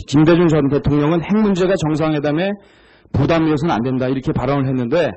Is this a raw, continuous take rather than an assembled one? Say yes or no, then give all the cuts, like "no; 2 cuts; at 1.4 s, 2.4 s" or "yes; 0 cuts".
yes; 0 cuts